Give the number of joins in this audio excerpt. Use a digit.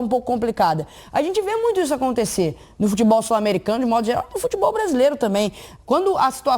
0